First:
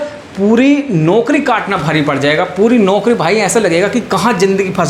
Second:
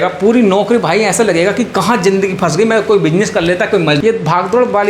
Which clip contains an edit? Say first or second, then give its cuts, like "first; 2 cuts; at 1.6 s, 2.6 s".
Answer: second; 1 cut; at 4.0 s